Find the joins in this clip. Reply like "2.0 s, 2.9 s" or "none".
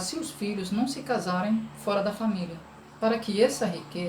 2.8 s